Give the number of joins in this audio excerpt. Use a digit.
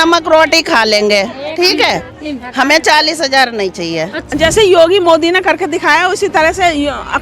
1